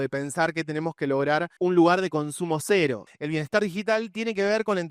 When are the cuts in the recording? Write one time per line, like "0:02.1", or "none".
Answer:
0:01.5
0:03.1